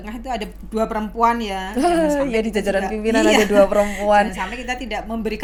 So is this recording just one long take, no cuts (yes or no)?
yes